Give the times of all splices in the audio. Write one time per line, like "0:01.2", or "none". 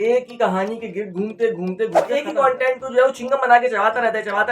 0:02.2